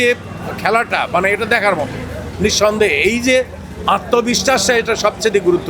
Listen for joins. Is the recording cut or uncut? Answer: uncut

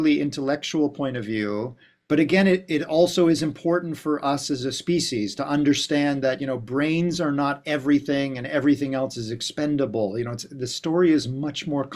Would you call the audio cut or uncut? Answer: uncut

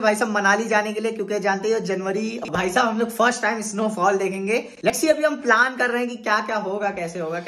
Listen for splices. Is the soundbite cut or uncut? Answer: cut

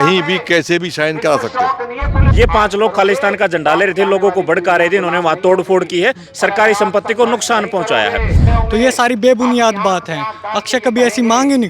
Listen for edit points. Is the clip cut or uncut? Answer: cut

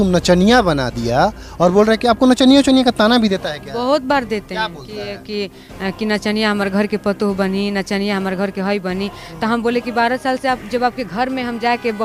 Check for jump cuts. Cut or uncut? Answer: uncut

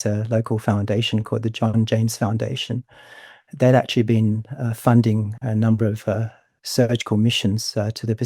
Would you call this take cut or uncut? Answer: uncut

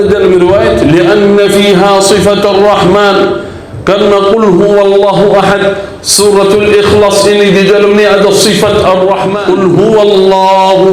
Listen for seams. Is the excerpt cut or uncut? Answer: cut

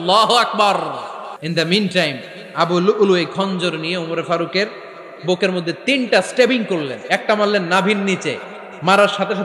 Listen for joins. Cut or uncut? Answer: cut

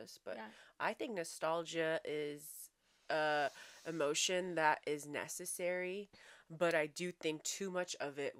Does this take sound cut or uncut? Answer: uncut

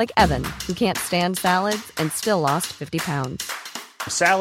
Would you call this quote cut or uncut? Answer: uncut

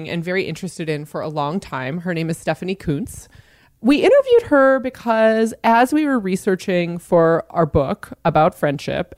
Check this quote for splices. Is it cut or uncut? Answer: cut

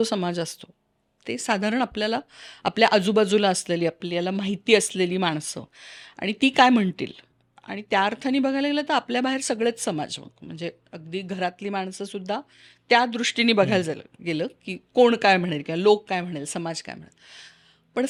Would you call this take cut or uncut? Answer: uncut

